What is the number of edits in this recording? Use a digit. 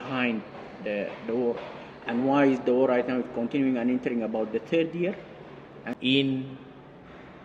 1